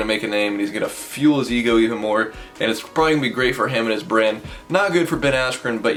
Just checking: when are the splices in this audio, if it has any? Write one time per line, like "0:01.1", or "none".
none